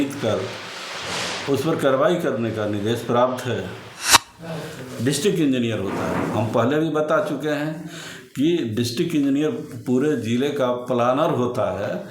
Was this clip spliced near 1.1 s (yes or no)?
no